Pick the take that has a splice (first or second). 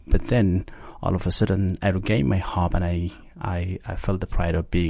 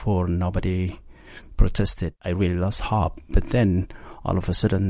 second